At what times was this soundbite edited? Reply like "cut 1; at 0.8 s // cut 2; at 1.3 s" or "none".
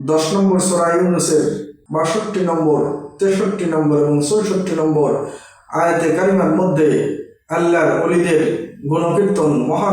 cut 1; at 1.7 s